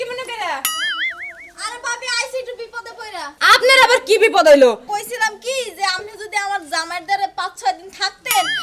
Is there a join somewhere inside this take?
yes; 1 cut; at 4.9 s

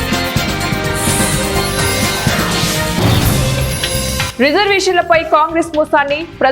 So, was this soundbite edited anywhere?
no; 0 cuts

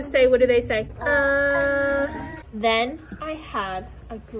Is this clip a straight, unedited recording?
no; 1 cut; at 2.4 s

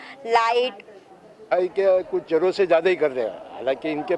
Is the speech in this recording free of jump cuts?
no; 1 cut; at 1.4 s

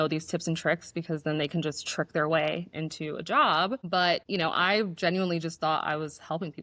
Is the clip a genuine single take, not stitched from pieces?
yes; 0 cuts

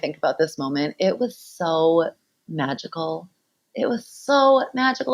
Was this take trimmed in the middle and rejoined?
no; 0 cuts

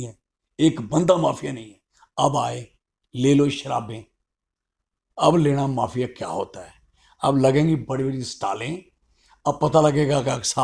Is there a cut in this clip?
no; 0 cuts

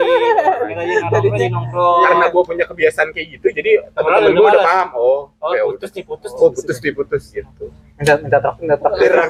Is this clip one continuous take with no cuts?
yes; 0 cuts

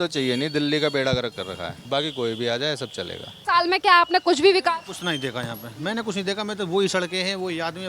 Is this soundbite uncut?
no; 2 cuts; at 1.7 s, 3.3 s

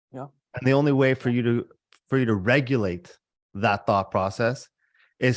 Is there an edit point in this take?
no; 0 cuts

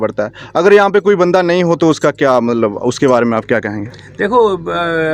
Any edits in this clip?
no; 0 cuts

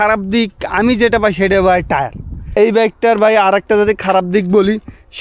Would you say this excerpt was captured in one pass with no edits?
no; 1 cut; at 2.5 s

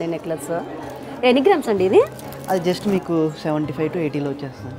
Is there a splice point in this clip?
no; 0 cuts

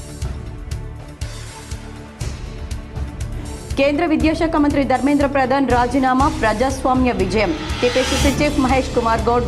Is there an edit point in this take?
yes; 1 cut; at 1.1 s

